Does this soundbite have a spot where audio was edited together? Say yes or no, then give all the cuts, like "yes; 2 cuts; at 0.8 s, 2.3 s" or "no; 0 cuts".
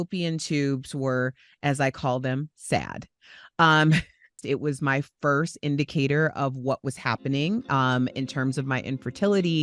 yes; 1 cut; at 4.4 s